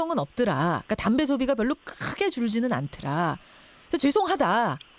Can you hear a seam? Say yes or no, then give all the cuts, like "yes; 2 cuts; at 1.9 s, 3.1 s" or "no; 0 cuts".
yes; 1 cut; at 2.6 s